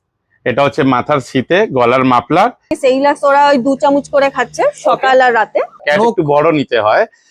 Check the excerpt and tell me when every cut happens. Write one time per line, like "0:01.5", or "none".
0:02.7
0:05.8